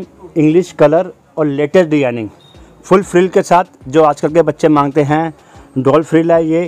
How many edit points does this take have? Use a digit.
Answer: 0